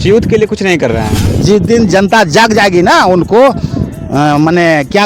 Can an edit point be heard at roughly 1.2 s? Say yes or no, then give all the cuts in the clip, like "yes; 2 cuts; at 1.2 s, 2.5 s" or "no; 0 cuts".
yes; 1 cut; at 1.2 s